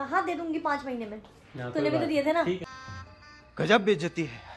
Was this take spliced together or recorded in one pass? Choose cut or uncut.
uncut